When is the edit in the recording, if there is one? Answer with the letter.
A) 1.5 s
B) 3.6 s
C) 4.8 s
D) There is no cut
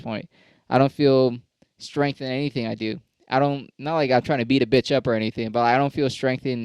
D